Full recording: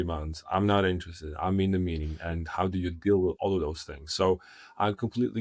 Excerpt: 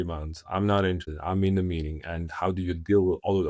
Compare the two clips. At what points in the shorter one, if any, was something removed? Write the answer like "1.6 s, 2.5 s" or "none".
1.1 s